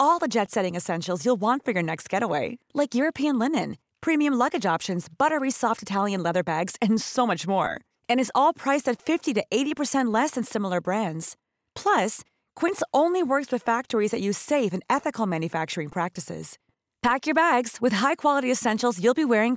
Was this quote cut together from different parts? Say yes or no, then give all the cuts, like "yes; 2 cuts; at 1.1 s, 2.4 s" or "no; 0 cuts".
no; 0 cuts